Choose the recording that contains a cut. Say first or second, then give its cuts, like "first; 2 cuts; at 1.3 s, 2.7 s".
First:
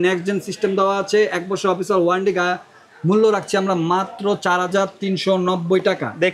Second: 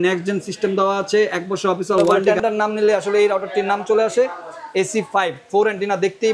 second; 1 cut; at 2.2 s